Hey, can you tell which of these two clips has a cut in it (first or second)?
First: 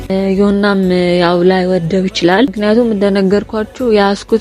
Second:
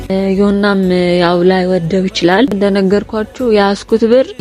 second